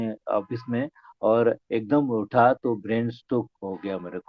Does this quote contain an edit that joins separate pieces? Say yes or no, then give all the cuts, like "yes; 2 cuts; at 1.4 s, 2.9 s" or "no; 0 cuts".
no; 0 cuts